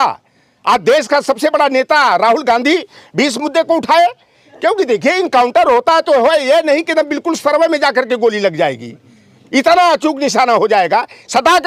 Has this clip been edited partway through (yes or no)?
no